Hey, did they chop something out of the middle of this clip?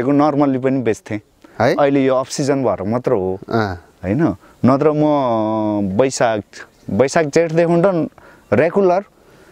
no; 0 cuts

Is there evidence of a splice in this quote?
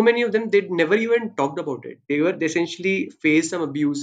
no; 0 cuts

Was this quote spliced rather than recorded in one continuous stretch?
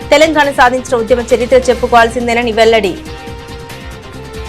no; 0 cuts

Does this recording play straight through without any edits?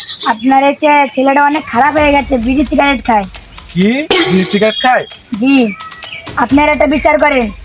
yes; 0 cuts

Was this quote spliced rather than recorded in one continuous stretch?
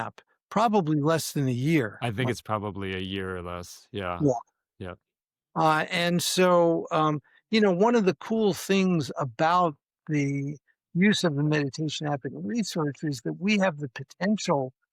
no; 0 cuts

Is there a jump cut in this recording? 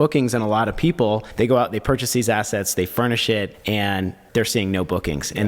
yes; 2 cuts; at 1.3 s, 3.5 s

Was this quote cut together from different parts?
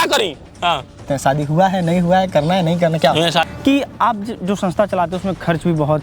yes; 2 cuts; at 1.0 s, 3.5 s

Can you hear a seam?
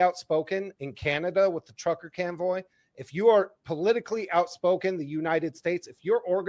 no; 0 cuts

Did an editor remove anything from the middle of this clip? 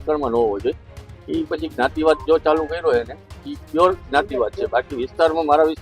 no; 0 cuts

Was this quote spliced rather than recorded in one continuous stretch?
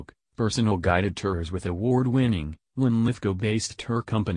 no; 0 cuts

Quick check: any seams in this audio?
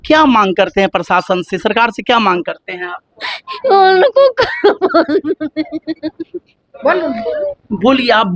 no; 0 cuts

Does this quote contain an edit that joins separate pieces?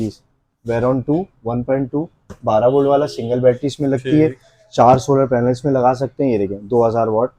no; 0 cuts

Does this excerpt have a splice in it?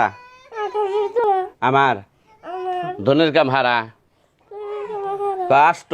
yes; 1 cut; at 1.2 s

